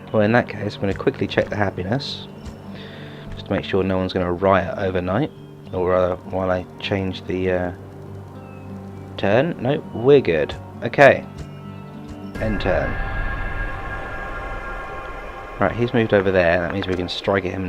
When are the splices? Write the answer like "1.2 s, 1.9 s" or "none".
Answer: none